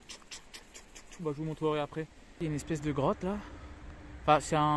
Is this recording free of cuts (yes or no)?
no